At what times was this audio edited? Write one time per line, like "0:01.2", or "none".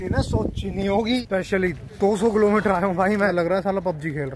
0:01.2
0:03.3